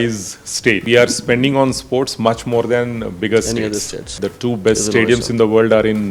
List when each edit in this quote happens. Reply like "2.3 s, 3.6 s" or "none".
0.8 s, 4.2 s